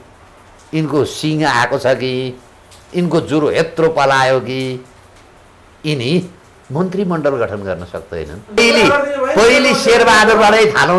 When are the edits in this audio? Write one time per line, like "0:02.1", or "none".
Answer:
0:08.6